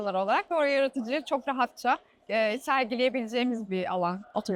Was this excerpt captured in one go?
yes; 0 cuts

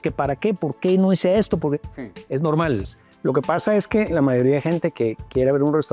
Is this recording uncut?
no; 1 cut; at 2.9 s

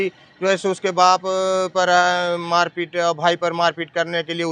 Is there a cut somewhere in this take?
no; 0 cuts

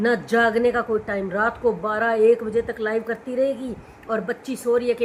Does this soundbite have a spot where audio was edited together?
no; 0 cuts

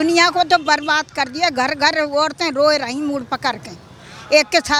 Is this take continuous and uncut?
yes; 0 cuts

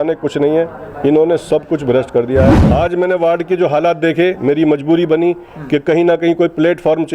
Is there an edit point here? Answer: yes; 1 cut; at 2.6 s

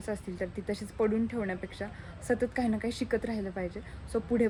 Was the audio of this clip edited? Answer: no; 0 cuts

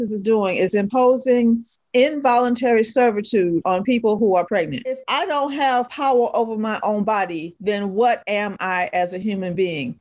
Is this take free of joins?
no; 1 cut; at 5.0 s

